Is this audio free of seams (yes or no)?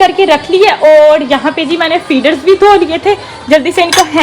yes